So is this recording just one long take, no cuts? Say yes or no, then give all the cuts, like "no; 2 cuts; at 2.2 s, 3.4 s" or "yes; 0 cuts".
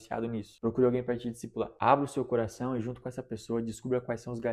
yes; 0 cuts